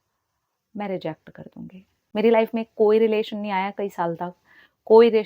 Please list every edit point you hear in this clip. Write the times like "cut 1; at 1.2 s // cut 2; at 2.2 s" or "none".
cut 1; at 2.0 s

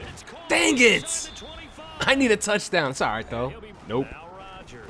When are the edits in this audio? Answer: cut 1; at 3.7 s

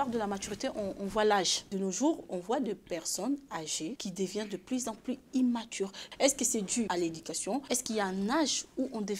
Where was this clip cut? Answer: cut 1; at 1.7 s // cut 2; at 6.0 s // cut 3; at 7.6 s

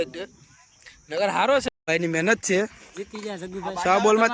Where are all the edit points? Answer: cut 1; at 1.9 s

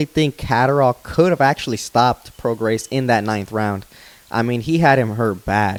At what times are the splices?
none

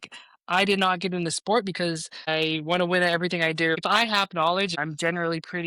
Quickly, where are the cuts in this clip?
cut 1; at 2.3 s // cut 2; at 3.8 s // cut 3; at 4.8 s

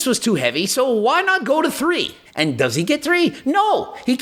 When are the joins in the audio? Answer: cut 1; at 2.2 s

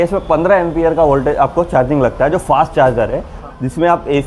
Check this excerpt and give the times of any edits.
none

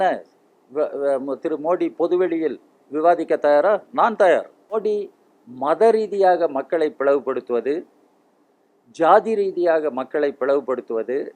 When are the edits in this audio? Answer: cut 1; at 4.6 s

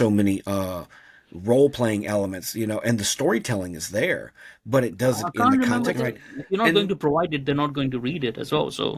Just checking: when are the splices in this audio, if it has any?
cut 1; at 6.0 s

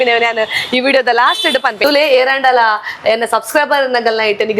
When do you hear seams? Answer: cut 1; at 1.8 s

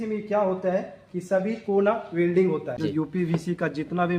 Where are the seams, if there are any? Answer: cut 1; at 2.7 s

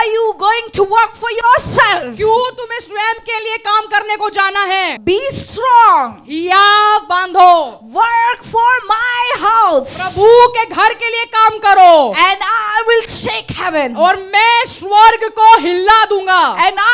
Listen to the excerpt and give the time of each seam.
cut 1; at 4.9 s

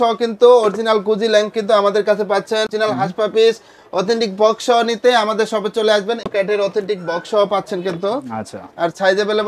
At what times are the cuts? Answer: cut 1; at 2.7 s // cut 2; at 6.3 s

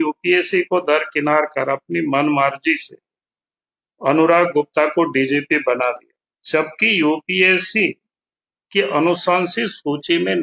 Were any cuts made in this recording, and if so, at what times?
none

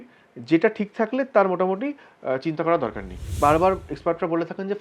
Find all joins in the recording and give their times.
cut 1; at 3.2 s

